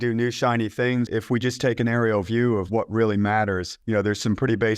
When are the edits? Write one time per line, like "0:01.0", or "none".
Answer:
0:01.1
0:03.7